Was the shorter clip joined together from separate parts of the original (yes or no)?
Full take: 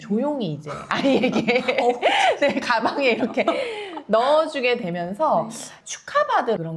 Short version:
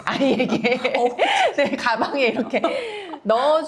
no